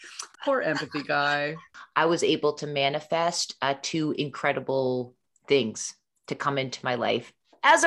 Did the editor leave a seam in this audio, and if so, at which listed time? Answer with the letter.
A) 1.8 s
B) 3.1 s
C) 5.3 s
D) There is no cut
A